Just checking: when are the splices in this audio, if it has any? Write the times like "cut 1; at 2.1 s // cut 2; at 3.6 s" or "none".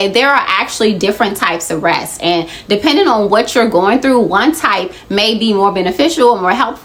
none